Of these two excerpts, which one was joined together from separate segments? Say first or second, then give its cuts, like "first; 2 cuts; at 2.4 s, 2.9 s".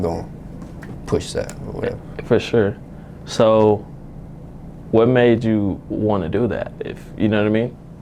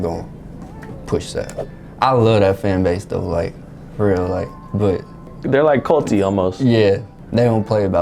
second; 3 cuts; at 1.6 s, 5.4 s, 7.2 s